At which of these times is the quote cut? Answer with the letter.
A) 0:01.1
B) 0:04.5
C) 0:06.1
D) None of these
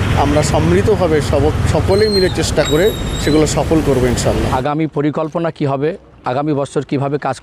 B